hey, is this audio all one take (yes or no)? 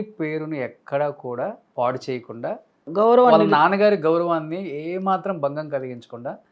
no